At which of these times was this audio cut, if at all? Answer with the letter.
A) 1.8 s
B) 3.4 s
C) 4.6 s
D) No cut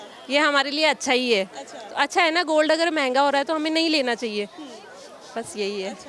D